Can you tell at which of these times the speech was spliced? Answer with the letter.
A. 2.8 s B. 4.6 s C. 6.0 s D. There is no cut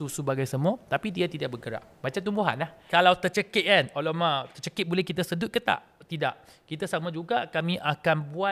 A